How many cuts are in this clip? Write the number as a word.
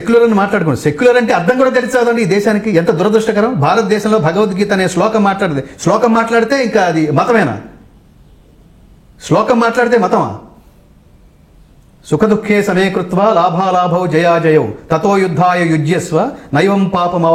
zero